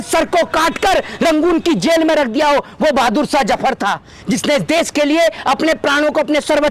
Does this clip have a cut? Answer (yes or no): no